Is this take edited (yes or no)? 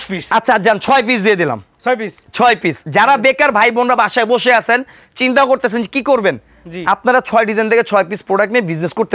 no